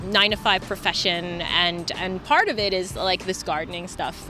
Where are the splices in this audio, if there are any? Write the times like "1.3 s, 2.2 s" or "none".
none

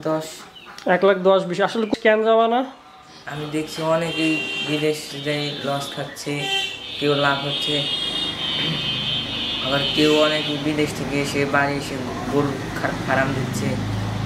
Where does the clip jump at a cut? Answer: 1.9 s

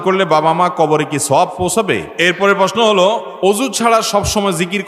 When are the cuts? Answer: 2.1 s, 3.3 s

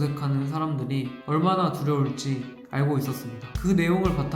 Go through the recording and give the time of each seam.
3.4 s

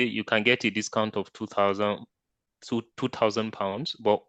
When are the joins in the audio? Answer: none

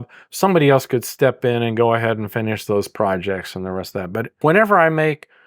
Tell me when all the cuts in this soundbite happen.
4.3 s

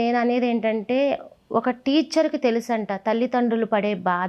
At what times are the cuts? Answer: none

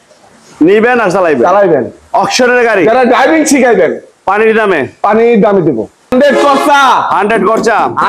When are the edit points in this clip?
6.1 s

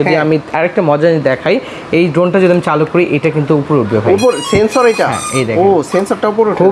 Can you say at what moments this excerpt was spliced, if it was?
none

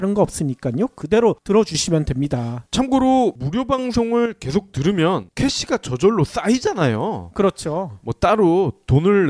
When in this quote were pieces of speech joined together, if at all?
3.1 s

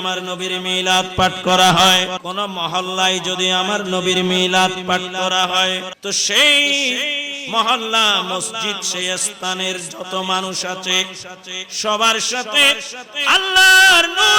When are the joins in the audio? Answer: 2.2 s, 5.9 s

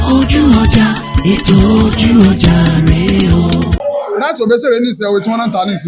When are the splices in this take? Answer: 3.8 s

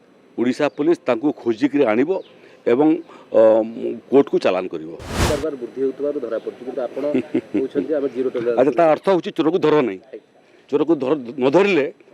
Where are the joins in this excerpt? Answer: 5.1 s

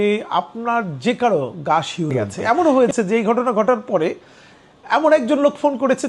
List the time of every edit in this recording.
2.3 s

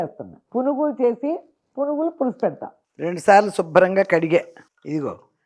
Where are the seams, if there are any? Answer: 2.7 s

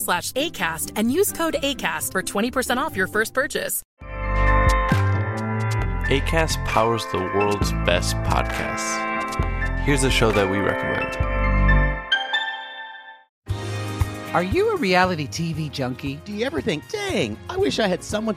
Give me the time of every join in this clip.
3.8 s, 5.3 s

